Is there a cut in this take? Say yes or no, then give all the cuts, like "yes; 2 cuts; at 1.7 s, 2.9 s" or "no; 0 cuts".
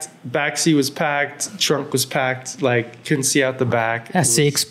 no; 0 cuts